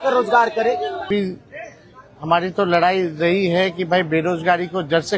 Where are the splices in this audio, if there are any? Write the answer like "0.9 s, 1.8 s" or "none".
1.1 s